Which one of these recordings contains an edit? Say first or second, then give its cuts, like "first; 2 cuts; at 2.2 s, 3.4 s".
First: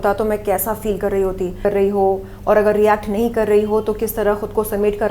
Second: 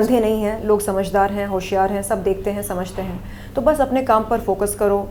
first; 1 cut; at 1.6 s